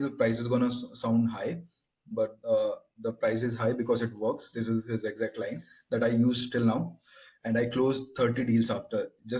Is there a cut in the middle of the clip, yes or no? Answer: no